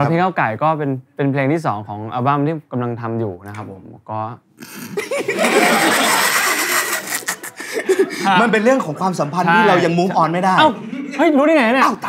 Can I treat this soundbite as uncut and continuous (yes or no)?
yes